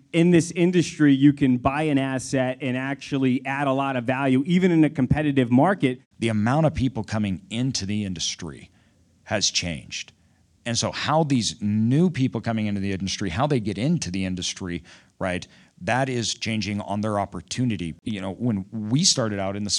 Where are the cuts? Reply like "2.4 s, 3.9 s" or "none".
6.1 s, 18.0 s